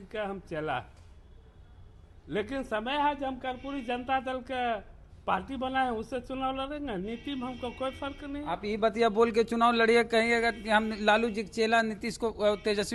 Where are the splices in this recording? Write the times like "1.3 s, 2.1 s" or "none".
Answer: none